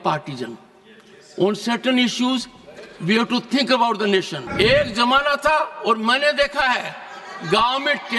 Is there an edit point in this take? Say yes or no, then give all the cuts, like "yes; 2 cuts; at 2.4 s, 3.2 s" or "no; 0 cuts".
yes; 1 cut; at 4.4 s